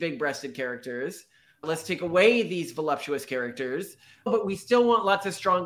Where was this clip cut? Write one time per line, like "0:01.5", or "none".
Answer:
0:04.3

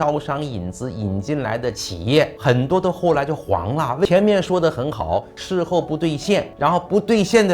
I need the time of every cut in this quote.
0:04.1

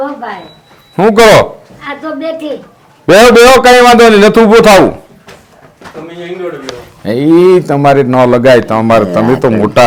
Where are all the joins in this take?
none

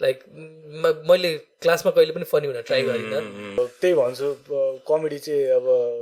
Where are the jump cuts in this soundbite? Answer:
0:03.6

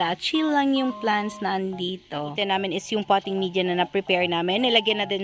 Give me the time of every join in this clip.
0:02.3

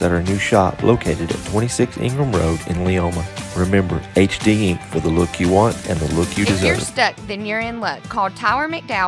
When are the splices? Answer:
0:06.9

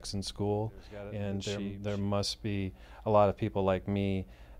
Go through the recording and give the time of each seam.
0:01.4

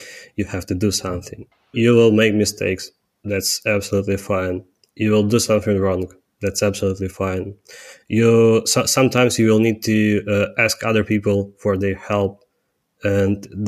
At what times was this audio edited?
0:01.6

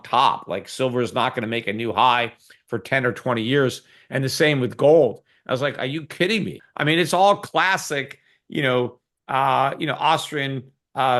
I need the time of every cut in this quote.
0:06.6

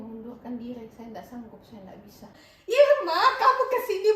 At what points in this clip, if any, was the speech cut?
0:02.4

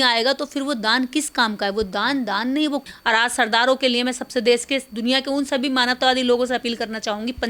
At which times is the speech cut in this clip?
0:02.8

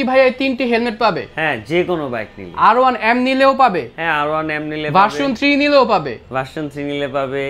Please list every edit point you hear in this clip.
none

